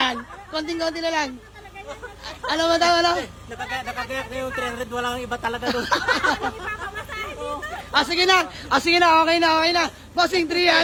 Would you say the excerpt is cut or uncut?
uncut